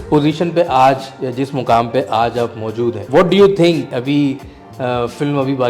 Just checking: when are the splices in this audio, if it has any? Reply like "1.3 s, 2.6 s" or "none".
3.0 s, 3.9 s